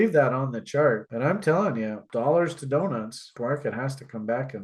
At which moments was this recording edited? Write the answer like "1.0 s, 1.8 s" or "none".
2.0 s